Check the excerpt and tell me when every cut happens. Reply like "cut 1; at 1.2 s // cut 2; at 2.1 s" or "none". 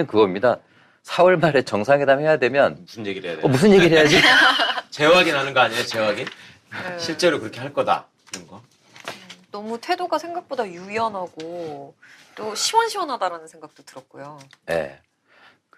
none